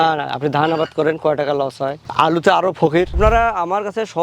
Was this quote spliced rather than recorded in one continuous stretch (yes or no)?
yes